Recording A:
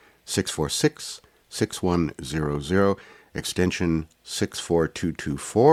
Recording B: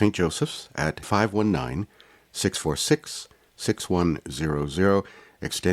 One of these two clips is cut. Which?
B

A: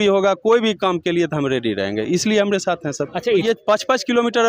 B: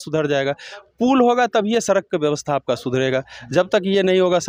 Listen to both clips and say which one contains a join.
A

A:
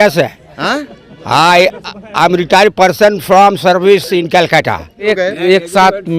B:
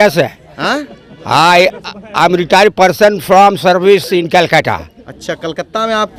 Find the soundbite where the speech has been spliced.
A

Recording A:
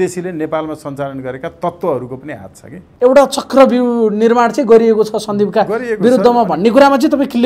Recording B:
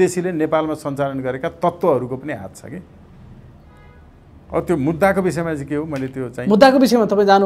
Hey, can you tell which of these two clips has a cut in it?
A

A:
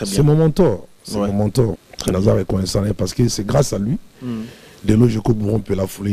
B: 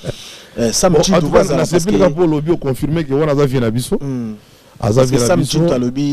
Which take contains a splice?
A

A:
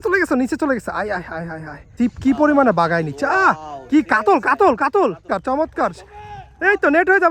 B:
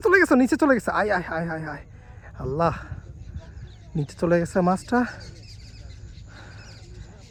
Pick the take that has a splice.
A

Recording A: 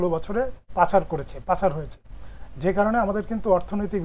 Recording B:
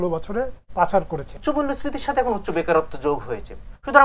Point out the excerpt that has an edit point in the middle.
B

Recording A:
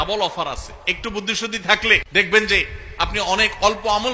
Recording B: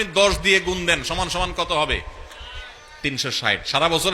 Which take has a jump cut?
A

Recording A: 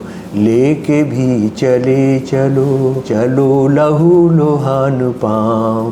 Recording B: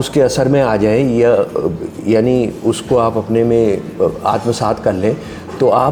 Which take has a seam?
A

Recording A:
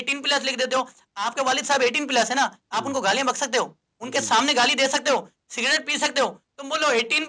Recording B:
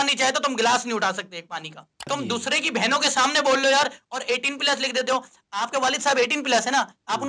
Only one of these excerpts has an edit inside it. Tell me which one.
B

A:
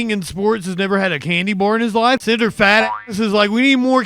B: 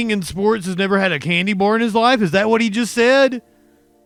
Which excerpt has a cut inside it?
A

